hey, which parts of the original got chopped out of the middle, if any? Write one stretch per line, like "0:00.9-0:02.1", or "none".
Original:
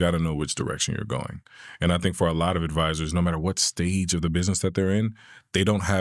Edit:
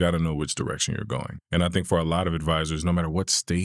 0:01.4-0:01.6

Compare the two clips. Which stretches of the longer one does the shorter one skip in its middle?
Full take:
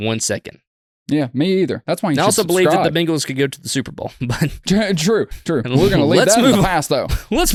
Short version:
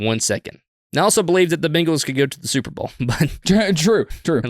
0:00.9-0:02.2

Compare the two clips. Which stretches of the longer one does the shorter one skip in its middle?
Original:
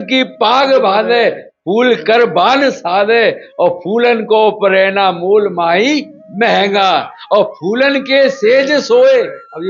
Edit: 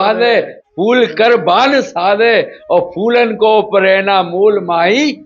none

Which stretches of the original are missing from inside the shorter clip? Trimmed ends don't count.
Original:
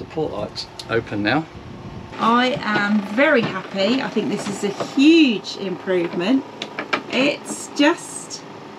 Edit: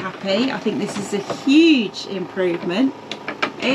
none

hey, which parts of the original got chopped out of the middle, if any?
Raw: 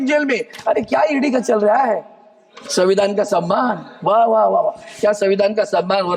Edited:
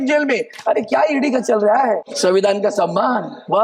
0:02.1-0:02.6

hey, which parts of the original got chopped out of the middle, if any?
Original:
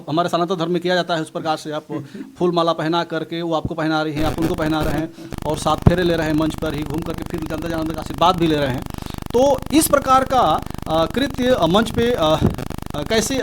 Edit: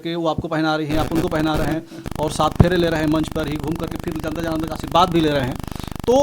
none

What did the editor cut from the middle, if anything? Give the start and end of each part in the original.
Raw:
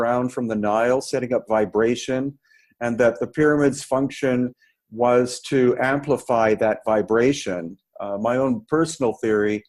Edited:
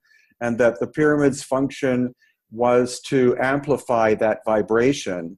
none

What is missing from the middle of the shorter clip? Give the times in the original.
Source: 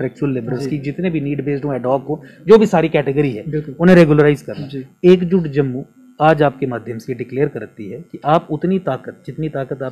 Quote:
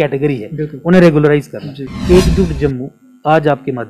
none

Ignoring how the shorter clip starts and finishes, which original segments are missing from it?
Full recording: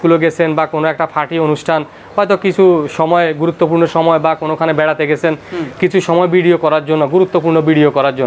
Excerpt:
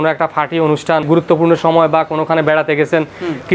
0:01.8-0:03.4

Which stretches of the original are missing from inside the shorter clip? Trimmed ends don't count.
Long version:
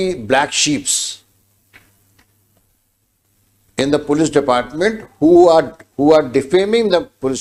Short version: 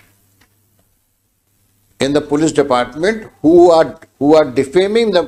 none

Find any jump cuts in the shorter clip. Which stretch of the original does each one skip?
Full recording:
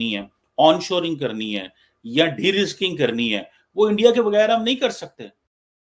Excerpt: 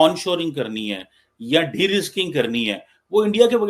none

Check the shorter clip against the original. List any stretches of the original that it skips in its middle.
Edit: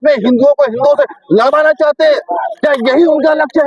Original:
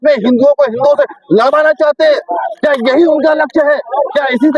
none

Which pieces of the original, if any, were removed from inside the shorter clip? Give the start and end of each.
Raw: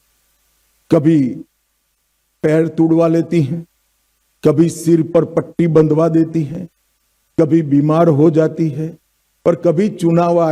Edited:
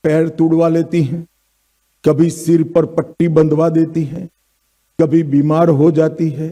none

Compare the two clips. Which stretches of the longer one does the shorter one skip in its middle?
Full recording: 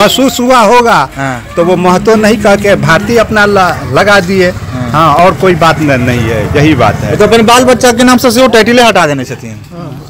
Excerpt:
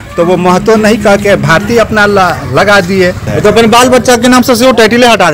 0:04.7-0:07.0

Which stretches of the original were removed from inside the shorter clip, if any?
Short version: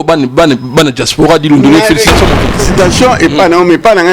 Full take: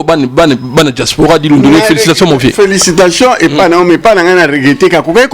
0:02.6-0:02.8

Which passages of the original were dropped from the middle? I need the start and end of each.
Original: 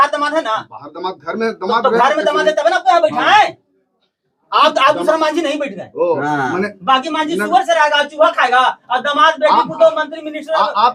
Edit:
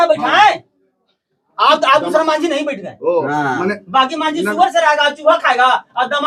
none

